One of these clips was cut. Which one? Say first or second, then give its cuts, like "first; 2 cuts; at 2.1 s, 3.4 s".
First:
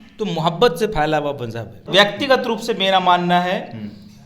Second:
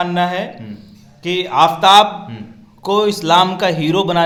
first; 1 cut; at 1.9 s